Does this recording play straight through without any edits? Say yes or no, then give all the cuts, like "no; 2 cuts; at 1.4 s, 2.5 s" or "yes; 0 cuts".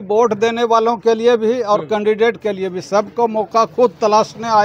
yes; 0 cuts